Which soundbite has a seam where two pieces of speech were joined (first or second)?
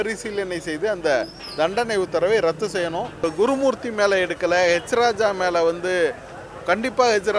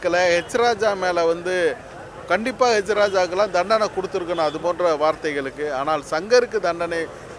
first